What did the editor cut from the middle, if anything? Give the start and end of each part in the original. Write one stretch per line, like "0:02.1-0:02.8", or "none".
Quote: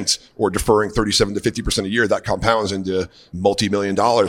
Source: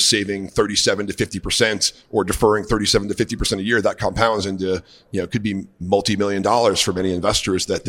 0:05.0-0:05.7